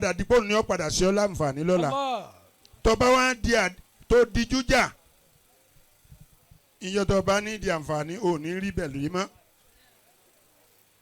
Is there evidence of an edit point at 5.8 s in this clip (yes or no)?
no